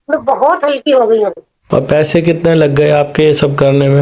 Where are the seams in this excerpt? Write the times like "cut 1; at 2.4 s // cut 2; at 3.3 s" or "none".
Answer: cut 1; at 1.5 s